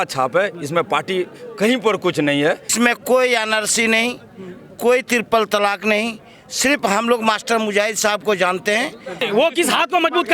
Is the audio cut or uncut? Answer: cut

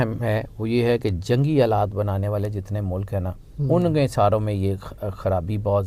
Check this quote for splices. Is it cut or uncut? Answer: uncut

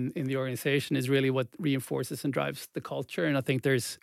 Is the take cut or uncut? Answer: uncut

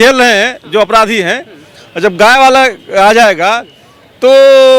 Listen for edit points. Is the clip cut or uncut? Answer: uncut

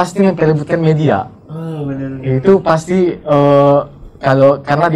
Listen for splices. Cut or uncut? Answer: uncut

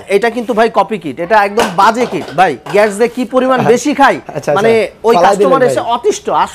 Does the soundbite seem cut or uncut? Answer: uncut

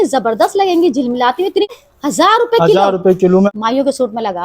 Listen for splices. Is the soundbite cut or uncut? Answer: cut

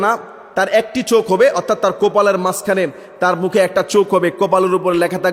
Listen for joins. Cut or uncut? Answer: uncut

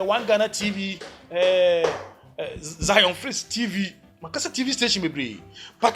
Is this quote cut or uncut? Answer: uncut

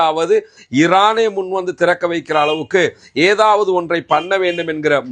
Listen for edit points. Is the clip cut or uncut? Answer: uncut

